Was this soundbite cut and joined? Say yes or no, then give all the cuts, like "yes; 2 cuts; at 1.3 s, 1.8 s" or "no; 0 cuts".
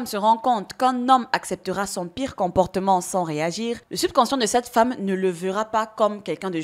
no; 0 cuts